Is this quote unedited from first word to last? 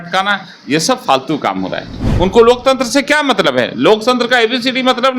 no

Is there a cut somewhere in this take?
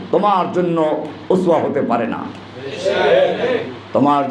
no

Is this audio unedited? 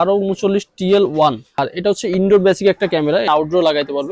no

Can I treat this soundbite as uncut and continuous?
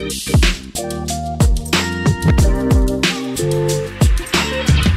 yes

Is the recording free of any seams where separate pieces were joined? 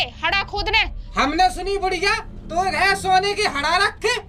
no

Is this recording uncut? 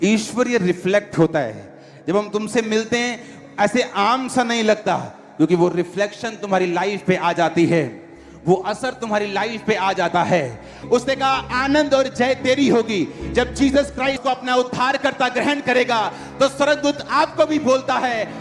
no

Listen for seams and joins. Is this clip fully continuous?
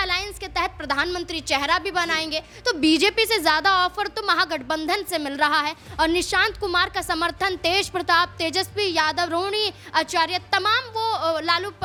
yes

